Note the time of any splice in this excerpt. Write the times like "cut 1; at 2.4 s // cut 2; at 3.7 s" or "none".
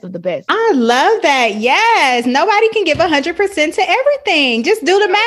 none